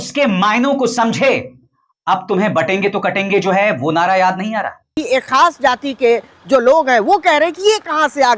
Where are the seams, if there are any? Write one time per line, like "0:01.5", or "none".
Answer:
0:05.0

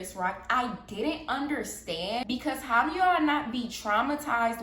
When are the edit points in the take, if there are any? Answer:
0:02.3

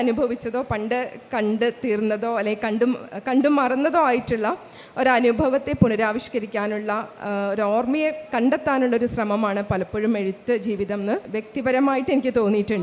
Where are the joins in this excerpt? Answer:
0:11.4

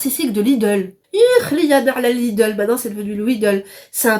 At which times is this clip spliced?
0:01.0

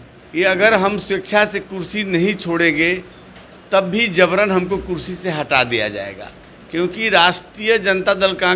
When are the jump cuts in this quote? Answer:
none

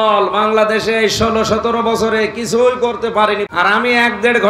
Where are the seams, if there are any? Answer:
0:03.5

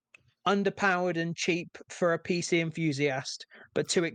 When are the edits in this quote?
none

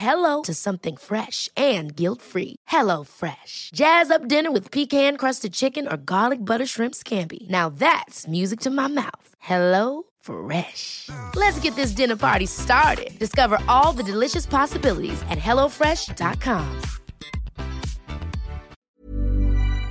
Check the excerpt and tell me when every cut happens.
0:18.7

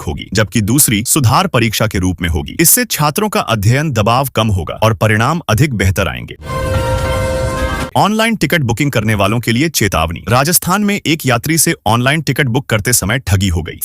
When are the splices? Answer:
0:06.3
0:07.9

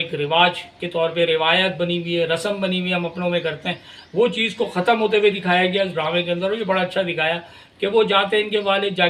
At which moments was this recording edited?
none

